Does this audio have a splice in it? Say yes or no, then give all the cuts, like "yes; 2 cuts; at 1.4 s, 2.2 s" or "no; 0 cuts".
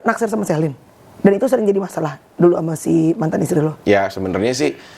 no; 0 cuts